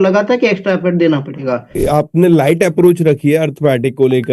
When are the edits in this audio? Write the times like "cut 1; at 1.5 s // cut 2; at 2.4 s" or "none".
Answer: cut 1; at 1.8 s